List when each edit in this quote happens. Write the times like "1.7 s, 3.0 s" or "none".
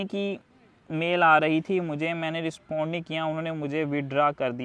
none

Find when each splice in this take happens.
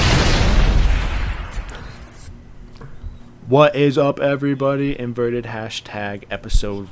2.1 s

